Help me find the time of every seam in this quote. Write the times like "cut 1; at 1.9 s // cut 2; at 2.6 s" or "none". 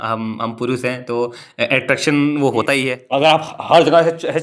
cut 1; at 3.0 s